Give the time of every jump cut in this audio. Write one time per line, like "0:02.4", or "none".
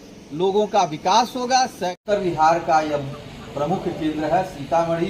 0:02.0